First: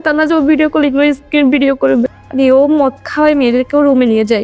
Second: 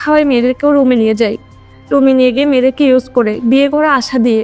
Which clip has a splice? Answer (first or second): first